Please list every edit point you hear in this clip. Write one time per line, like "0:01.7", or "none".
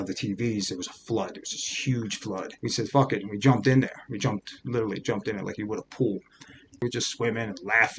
0:02.5
0:06.8